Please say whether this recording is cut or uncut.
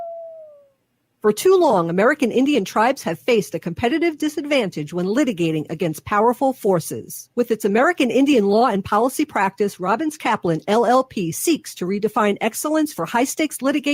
cut